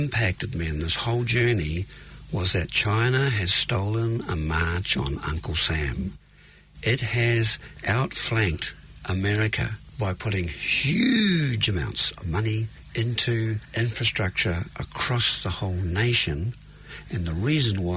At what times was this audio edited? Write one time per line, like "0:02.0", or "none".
0:07.8
0:09.8
0:12.8
0:13.7